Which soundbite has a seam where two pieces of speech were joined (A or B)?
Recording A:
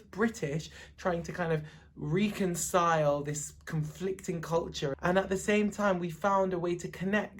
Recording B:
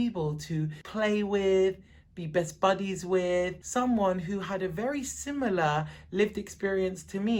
A